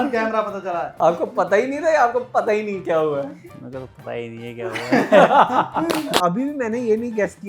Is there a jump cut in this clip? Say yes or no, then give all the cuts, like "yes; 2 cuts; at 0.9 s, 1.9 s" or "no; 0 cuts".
yes; 2 cuts; at 0.9 s, 6.2 s